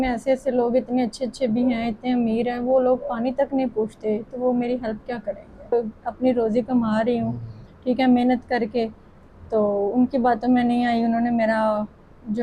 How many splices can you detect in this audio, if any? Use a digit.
1